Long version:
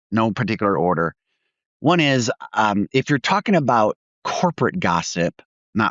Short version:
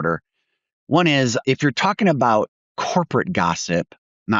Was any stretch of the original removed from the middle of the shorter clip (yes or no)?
yes